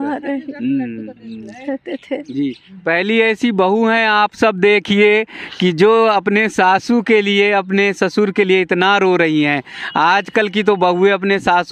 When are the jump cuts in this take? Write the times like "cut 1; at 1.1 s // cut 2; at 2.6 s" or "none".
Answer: none